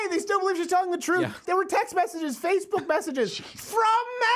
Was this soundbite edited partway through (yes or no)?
yes